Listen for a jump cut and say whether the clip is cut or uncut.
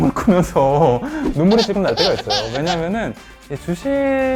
uncut